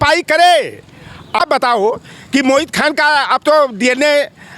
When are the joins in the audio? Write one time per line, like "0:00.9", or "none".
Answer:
0:01.4

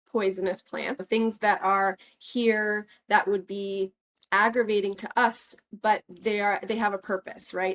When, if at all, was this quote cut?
0:01.0

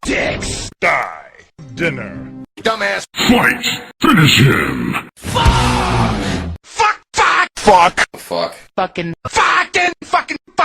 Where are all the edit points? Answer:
0:05.6

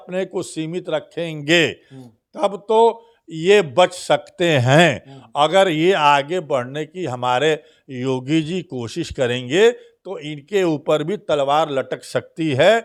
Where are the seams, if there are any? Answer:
none

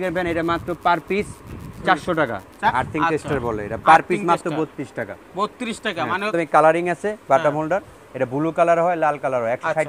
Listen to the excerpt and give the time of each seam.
0:02.5
0:06.3

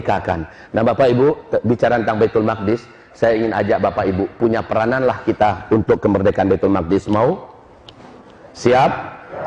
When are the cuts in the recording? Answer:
none

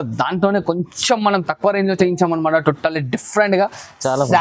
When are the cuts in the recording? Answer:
none

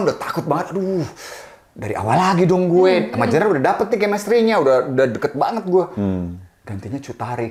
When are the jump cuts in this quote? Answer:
none

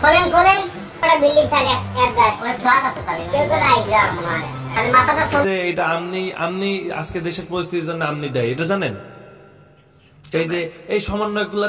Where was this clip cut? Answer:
0:05.4

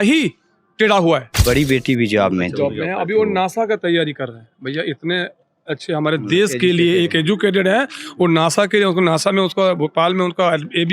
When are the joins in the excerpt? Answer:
0:01.4

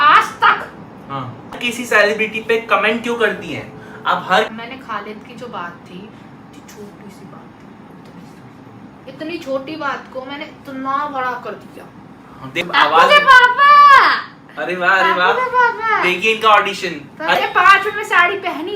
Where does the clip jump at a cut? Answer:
0:01.6
0:04.5
0:12.6
0:17.4

